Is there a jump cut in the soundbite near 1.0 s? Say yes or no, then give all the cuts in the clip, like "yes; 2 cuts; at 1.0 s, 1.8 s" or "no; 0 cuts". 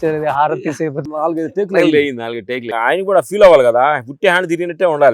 yes; 2 cuts; at 1.0 s, 2.7 s